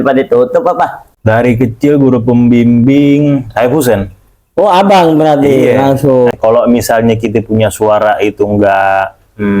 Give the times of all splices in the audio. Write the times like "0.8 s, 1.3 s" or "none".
1.0 s, 6.3 s